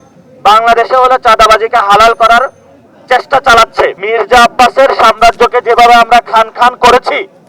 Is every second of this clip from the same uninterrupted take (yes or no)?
no